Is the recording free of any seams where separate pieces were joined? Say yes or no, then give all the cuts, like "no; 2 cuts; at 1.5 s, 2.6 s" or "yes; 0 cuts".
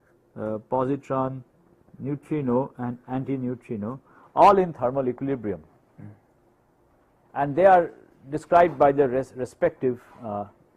no; 1 cut; at 5.9 s